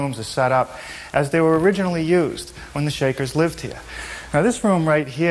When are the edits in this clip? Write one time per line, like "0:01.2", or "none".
0:01.8